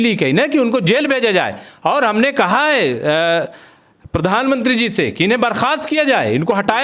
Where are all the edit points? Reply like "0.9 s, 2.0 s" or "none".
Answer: none